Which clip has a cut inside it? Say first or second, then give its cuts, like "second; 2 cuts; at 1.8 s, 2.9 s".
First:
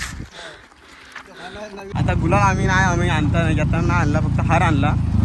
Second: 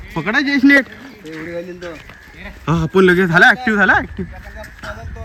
first; 1 cut; at 1.9 s